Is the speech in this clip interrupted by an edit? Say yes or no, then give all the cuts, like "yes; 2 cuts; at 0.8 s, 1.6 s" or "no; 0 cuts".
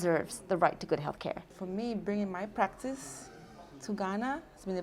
yes; 1 cut; at 1.6 s